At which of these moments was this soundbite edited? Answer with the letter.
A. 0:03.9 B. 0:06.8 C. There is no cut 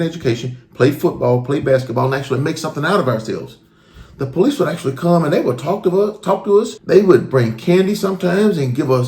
B